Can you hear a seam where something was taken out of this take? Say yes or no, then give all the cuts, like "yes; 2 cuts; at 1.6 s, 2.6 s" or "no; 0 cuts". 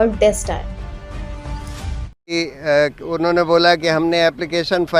no; 0 cuts